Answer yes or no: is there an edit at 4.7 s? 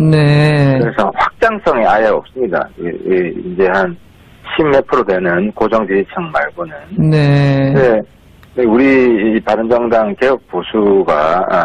yes